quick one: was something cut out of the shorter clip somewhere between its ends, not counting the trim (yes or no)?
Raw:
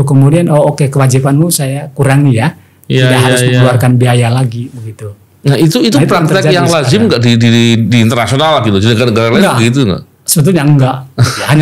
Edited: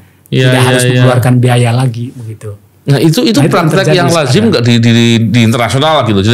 no